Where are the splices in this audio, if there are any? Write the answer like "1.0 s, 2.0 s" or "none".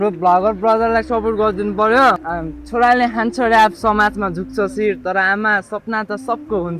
2.3 s